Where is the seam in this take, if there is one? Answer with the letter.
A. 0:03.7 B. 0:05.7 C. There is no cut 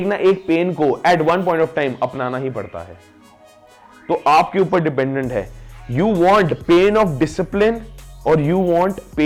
C